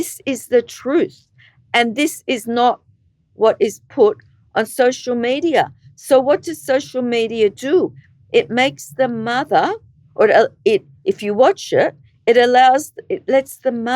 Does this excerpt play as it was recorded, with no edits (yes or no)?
yes